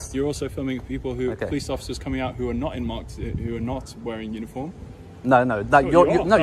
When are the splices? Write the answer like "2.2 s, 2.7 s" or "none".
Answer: none

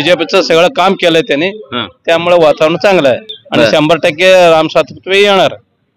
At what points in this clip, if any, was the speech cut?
none

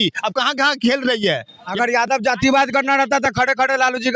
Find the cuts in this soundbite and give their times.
1.7 s

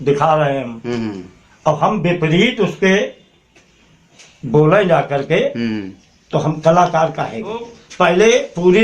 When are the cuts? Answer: 7.8 s

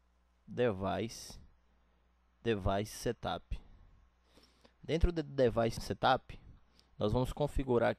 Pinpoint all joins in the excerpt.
5.8 s

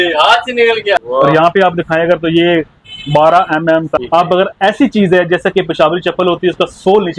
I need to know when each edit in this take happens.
1.0 s, 3.9 s

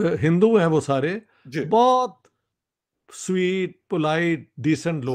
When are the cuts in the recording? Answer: none

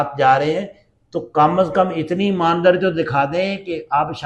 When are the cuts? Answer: none

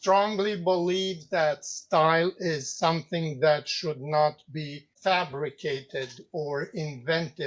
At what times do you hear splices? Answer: 4.8 s

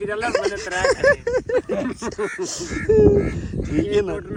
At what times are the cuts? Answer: none

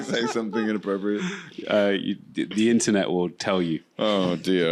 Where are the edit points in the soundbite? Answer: none

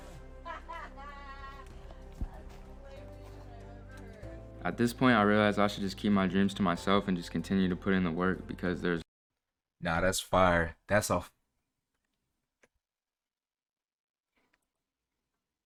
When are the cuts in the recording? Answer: none

